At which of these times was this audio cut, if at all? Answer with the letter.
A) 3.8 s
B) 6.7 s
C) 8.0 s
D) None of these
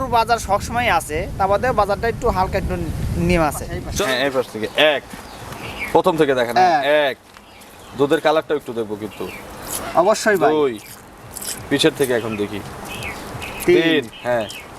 A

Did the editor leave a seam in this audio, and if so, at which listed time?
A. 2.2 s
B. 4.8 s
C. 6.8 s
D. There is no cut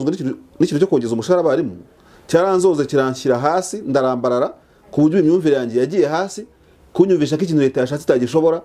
D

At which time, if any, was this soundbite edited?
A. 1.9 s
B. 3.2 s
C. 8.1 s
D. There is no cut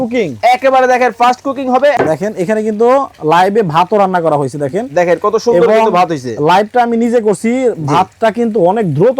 A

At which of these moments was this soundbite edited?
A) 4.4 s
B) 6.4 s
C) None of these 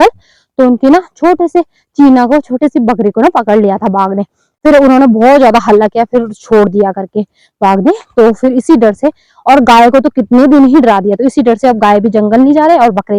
C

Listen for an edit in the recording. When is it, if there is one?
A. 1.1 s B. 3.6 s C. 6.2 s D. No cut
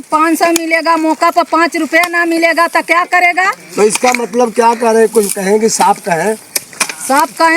D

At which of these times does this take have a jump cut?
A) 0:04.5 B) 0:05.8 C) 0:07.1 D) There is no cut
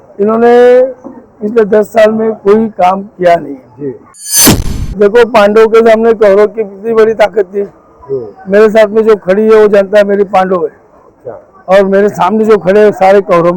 A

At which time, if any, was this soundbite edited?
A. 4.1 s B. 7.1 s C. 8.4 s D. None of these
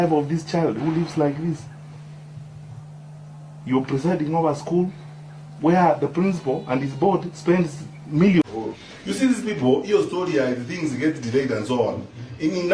C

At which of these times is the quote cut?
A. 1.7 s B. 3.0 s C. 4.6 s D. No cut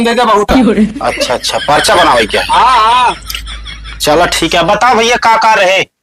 D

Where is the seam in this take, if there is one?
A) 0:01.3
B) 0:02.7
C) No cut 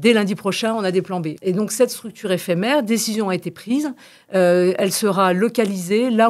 A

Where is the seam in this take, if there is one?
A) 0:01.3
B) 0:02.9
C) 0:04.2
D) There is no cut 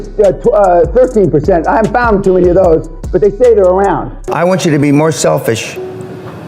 C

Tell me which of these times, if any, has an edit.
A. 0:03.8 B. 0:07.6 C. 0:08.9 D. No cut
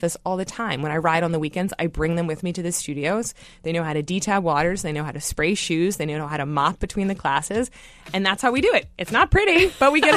C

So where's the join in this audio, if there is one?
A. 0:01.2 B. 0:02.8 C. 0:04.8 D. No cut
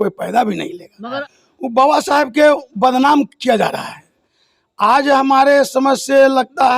A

